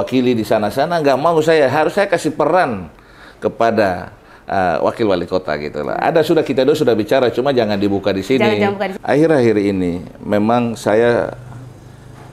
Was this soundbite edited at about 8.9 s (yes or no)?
yes